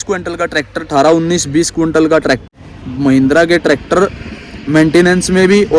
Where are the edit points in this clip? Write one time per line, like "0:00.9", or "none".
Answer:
0:02.4